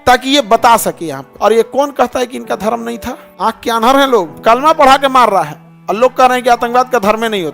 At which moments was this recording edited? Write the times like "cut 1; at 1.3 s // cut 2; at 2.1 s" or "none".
cut 1; at 1.3 s // cut 2; at 3.2 s // cut 3; at 4.3 s

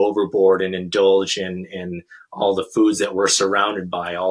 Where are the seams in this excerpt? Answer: none

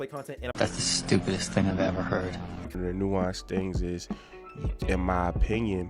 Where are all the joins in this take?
cut 1; at 2.8 s

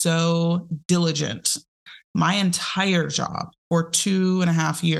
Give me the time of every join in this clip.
cut 1; at 1.8 s

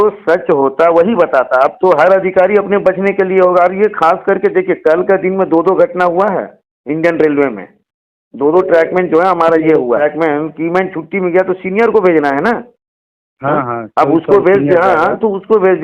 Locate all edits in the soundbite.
cut 1; at 10.0 s

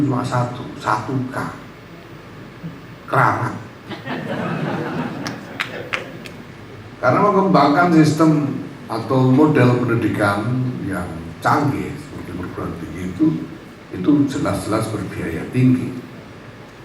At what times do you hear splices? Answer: cut 1; at 6.4 s

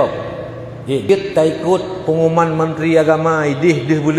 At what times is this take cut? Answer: cut 1; at 1.0 s

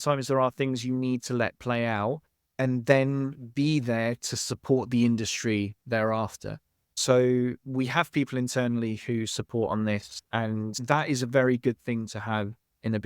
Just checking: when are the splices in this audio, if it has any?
cut 1; at 10.7 s

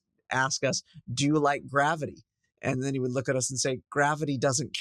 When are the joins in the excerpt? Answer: none

